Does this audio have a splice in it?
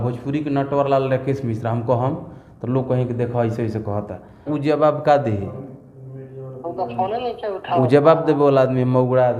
yes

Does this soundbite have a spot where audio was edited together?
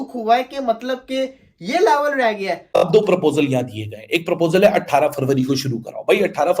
yes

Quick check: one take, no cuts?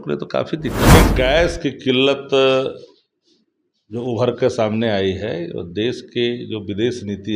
no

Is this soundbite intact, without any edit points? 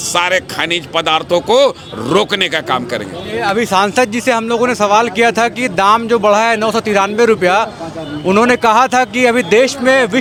yes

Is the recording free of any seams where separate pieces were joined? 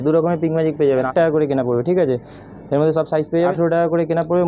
no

